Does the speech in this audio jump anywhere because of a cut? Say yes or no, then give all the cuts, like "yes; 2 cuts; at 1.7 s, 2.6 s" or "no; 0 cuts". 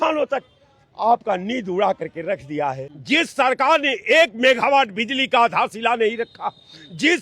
yes; 1 cut; at 2.9 s